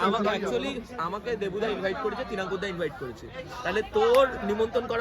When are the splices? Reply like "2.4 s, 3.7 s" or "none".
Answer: none